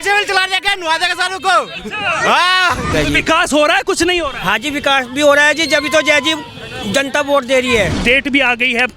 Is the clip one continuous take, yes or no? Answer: no